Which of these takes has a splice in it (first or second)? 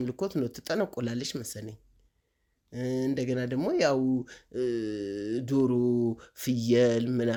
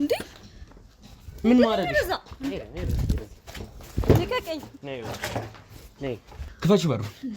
second